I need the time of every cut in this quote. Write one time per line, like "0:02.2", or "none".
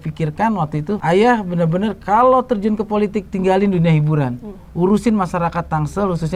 0:01.0